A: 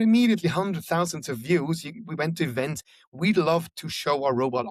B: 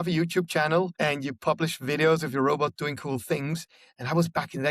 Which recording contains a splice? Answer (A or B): B